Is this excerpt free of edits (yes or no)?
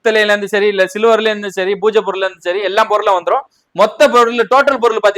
yes